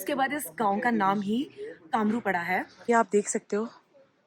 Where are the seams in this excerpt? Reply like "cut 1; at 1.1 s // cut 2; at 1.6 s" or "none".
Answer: cut 1; at 2.7 s